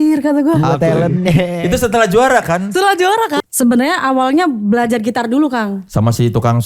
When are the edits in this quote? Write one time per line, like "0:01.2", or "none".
0:03.4